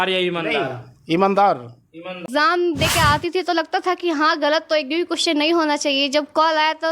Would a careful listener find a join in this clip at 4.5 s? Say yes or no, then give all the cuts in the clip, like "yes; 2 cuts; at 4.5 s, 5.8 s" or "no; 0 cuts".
no; 1 cut; at 2.2 s